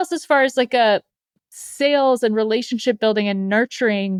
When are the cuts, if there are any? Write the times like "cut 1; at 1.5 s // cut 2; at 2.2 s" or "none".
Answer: none